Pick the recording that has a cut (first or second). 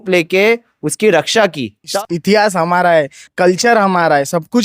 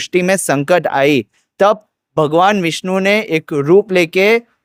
first